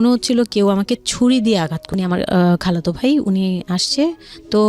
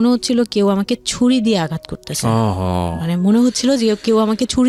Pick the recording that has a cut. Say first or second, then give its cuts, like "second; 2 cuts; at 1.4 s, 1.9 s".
first; 1 cut; at 1.8 s